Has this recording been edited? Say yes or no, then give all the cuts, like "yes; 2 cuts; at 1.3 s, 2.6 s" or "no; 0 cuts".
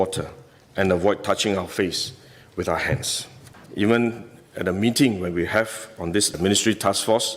yes; 1 cut; at 3.6 s